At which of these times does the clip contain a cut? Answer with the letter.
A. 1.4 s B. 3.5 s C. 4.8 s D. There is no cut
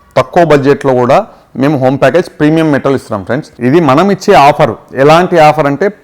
B